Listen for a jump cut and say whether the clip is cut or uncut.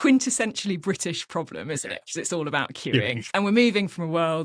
cut